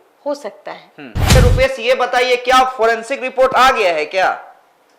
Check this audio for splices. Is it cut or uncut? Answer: cut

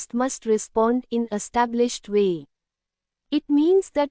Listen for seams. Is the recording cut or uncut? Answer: cut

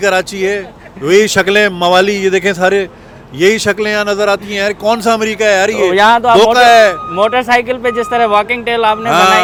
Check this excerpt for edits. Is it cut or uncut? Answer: uncut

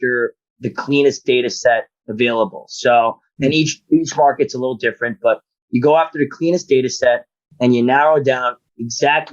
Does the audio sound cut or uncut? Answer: uncut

